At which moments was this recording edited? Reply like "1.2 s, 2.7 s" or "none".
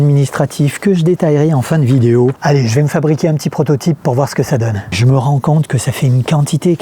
2.4 s, 4.9 s